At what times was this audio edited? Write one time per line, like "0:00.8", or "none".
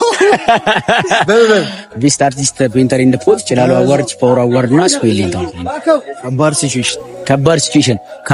none